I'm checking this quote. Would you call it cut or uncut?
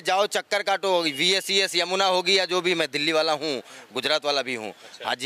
uncut